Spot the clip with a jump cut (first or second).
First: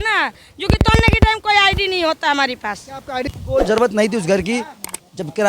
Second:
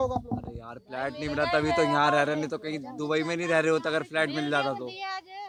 first